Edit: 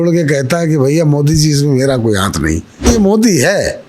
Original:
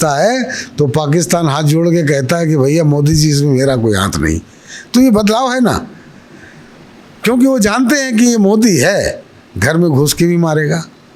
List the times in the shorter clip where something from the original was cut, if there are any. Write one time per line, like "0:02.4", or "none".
0:02.9